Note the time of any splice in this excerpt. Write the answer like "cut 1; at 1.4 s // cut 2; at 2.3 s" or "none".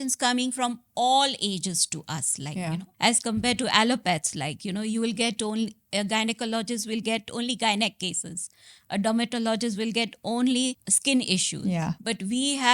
cut 1; at 2.9 s // cut 2; at 10.9 s // cut 3; at 12.0 s